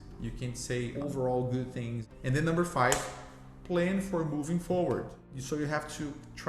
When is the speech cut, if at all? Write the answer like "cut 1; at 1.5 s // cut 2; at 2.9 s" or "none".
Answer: cut 1; at 0.9 s // cut 2; at 2.0 s